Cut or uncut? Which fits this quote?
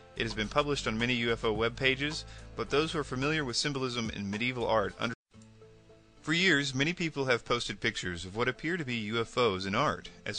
uncut